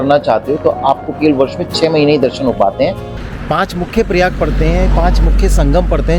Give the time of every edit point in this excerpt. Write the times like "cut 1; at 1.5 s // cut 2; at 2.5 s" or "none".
cut 1; at 3.1 s